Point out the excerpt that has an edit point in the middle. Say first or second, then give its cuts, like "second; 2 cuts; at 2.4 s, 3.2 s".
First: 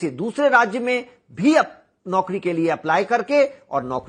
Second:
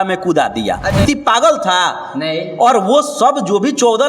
second; 1 cut; at 1.0 s